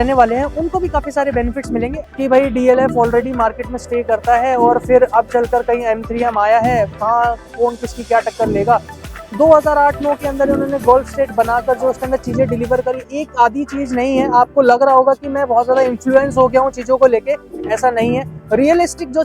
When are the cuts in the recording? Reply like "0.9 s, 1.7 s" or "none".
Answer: 2.0 s, 13.0 s